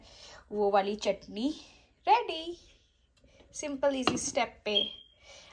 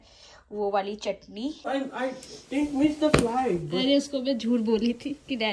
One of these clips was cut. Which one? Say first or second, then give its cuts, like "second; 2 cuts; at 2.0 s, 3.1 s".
second; 1 cut; at 1.6 s